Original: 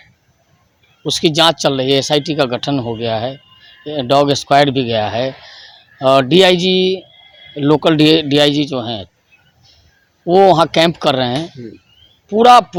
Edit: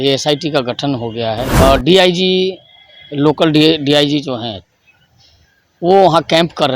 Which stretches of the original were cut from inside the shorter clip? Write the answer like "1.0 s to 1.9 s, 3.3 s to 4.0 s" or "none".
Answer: 3.3 s to 5.9 s